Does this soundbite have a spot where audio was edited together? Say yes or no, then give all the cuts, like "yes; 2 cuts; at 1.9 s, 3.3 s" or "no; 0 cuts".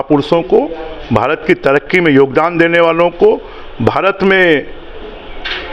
no; 0 cuts